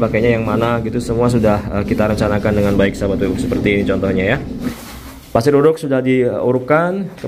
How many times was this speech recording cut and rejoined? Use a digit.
1